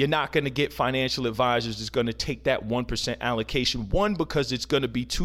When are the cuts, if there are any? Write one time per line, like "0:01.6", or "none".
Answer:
none